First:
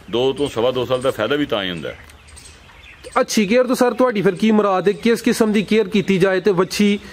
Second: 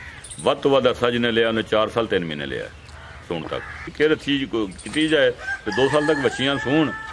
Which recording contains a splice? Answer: second; 1 cut; at 3.8 s

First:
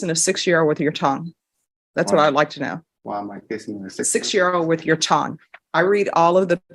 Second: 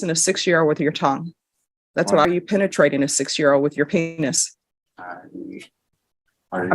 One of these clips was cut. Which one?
second; 1 cut; at 2.2 s

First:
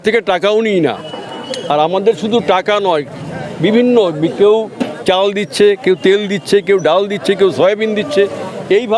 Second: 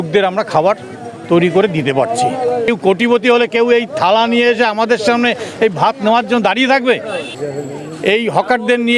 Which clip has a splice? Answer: second; 2 cuts; at 2.7 s, 7.3 s

